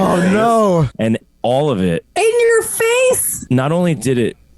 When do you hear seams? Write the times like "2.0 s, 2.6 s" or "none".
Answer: 0.9 s, 3.3 s